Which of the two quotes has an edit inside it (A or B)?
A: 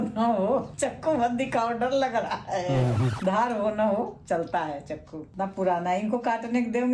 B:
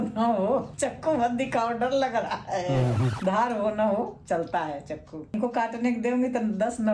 B